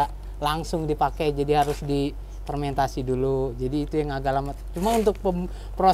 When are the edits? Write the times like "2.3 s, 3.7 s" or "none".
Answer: none